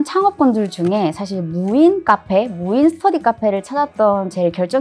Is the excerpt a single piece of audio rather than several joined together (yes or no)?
yes